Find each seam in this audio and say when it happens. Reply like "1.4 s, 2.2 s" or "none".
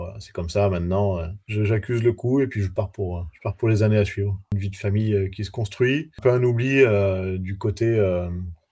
4.5 s, 6.1 s